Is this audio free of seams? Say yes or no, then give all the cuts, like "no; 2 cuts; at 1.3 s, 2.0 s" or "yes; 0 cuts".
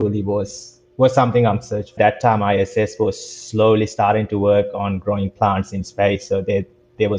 no; 1 cut; at 1.9 s